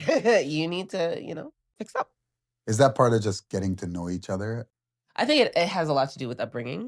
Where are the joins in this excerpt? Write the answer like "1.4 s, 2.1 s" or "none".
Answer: 1.6 s, 4.7 s